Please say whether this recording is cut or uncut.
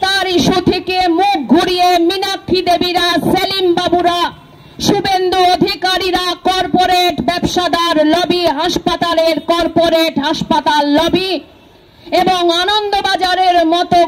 uncut